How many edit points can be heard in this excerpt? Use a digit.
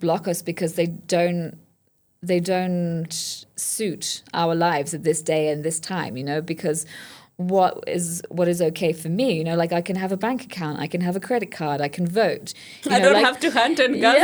0